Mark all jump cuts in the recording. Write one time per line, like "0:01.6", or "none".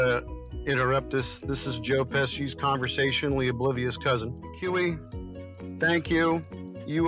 0:04.5